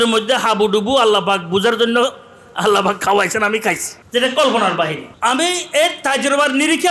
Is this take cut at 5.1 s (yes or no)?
yes